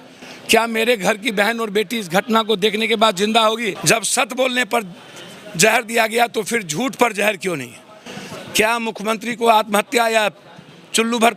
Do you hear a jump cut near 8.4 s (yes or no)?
no